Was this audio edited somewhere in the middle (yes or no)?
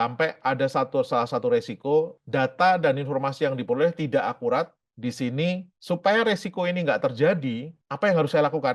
no